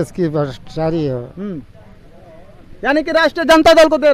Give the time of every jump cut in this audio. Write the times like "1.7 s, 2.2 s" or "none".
none